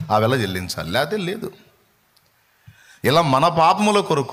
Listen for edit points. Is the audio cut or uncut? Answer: uncut